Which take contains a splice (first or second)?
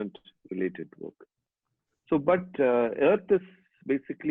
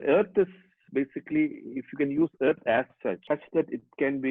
second